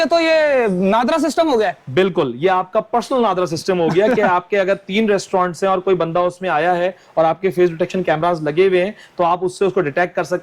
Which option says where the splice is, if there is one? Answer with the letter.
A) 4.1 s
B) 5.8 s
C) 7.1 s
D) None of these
D